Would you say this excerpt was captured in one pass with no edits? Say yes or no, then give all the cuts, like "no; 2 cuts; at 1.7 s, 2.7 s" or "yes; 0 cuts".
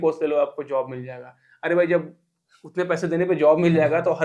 yes; 0 cuts